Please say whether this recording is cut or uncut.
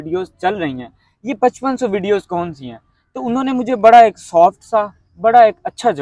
uncut